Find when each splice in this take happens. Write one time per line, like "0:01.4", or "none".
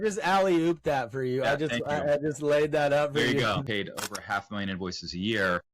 0:03.5